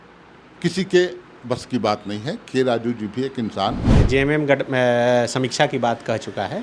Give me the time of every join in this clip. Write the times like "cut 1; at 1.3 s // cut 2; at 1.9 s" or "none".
cut 1; at 3.9 s